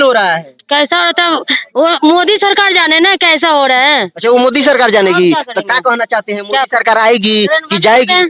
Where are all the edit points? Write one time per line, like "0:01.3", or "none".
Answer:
none